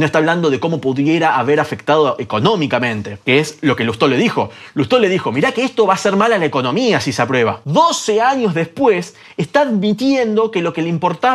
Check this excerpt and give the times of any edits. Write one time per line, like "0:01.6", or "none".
0:07.6